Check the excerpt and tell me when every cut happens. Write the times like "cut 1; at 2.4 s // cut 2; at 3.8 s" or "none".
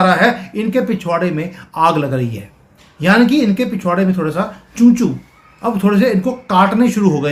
none